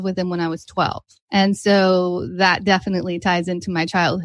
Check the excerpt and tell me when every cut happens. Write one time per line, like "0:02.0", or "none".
0:01.1

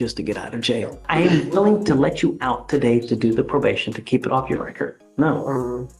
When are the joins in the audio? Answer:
0:01.0
0:05.0

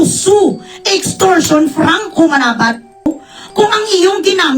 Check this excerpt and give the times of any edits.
0:03.0

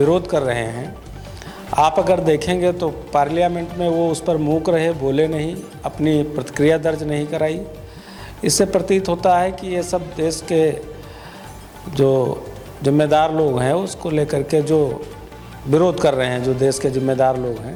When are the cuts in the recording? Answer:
none

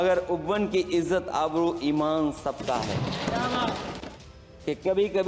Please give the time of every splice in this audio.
0:04.0

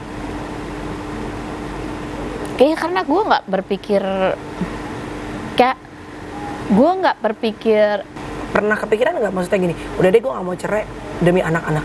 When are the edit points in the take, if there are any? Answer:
0:08.2

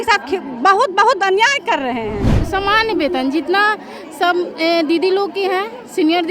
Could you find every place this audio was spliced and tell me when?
0:02.3

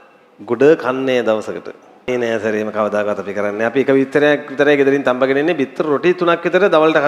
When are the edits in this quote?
0:02.1

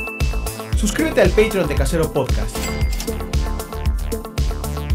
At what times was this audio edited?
0:01.7

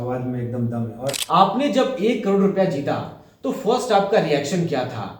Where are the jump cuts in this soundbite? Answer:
0:01.2

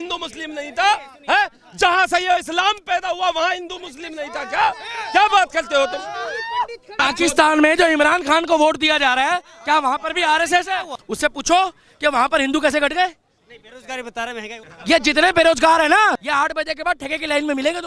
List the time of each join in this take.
0:07.0
0:11.0
0:14.6
0:16.2

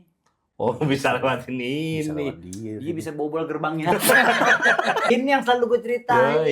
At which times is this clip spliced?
0:05.1

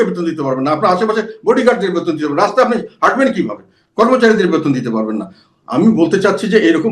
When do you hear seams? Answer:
none

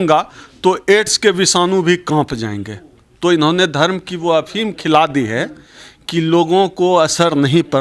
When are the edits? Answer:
none

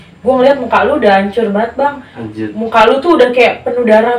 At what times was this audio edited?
none

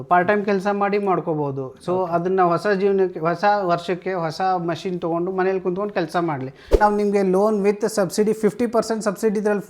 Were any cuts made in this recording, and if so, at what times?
0:06.8

